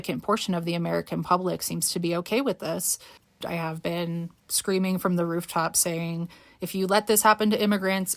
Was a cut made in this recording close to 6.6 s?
no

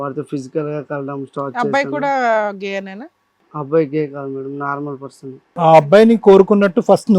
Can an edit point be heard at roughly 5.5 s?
yes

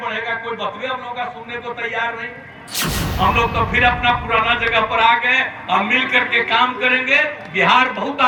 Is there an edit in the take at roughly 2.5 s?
no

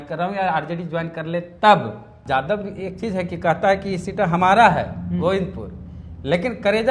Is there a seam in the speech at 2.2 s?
yes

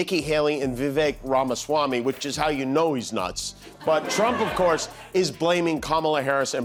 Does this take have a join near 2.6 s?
no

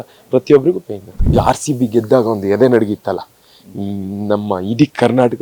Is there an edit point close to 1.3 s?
yes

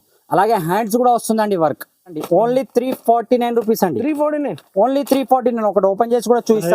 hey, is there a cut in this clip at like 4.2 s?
no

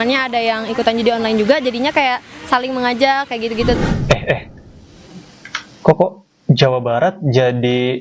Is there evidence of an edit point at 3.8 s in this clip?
yes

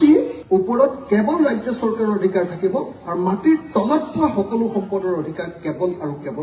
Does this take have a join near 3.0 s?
no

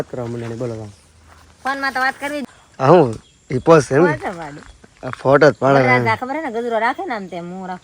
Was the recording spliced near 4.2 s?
no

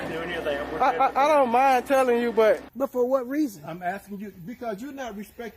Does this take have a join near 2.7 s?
yes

